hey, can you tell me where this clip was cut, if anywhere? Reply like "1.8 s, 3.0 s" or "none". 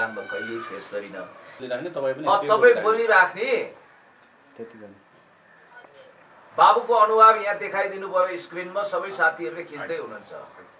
1.4 s

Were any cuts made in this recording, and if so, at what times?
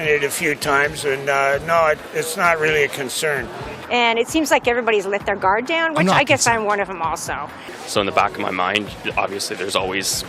3.8 s, 7.7 s

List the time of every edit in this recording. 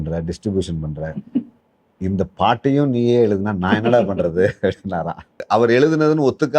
5.4 s

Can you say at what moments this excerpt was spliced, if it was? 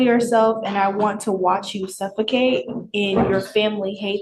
none

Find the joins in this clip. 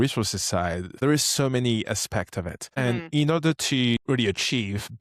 1.0 s, 2.6 s, 4.3 s

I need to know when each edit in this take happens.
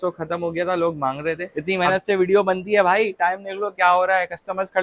1.5 s

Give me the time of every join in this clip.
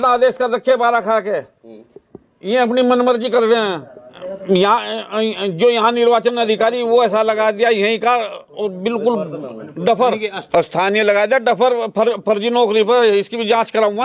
none

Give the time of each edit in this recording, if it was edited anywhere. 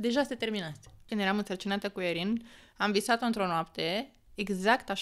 1.0 s

